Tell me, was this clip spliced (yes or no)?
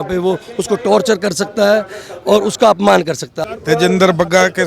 yes